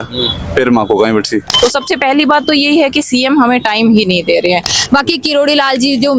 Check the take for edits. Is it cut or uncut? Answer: cut